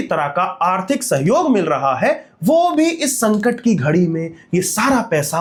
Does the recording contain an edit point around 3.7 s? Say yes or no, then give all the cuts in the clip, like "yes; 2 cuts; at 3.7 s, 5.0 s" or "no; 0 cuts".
no; 0 cuts